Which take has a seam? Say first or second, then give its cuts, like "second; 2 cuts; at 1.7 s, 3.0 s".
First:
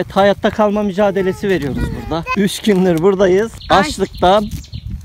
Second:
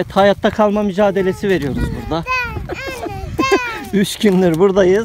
first; 2 cuts; at 2.3 s, 3.6 s